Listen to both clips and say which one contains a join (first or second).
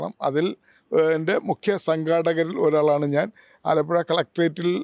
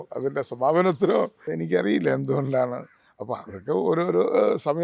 second